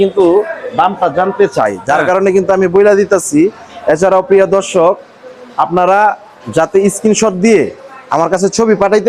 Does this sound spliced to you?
no; 0 cuts

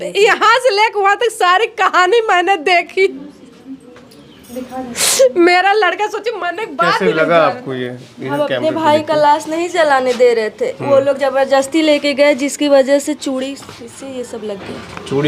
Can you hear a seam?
no; 0 cuts

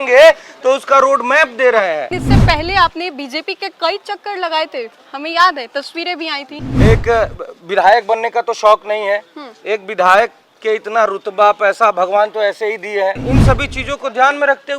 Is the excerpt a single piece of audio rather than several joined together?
no; 3 cuts; at 2.2 s, 6.6 s, 13.2 s

